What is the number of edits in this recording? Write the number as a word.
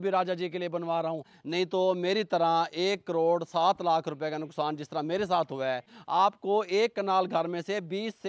two